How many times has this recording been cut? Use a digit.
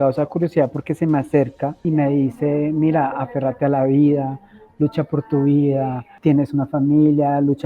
2